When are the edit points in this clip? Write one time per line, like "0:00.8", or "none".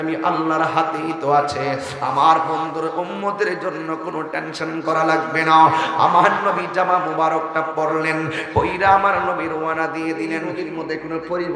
0:10.6